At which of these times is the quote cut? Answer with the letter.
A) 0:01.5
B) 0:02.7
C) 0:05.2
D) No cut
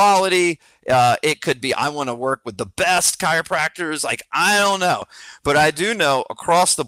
C